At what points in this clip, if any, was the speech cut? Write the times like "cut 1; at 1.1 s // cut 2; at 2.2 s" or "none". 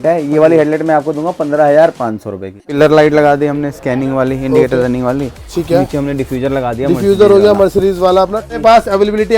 cut 1; at 2.7 s // cut 2; at 8.5 s